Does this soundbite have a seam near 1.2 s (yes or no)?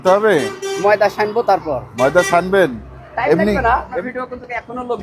no